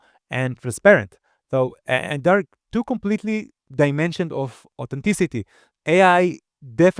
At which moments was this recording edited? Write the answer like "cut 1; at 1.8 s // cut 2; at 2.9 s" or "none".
cut 1; at 5.7 s